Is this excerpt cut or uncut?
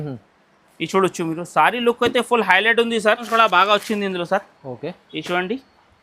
cut